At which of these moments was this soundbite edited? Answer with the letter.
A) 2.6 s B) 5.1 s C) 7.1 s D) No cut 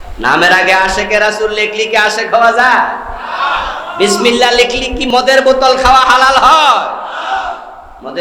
B